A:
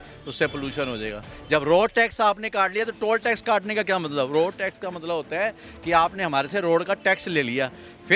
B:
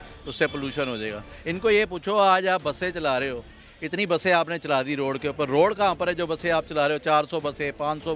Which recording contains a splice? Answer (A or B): A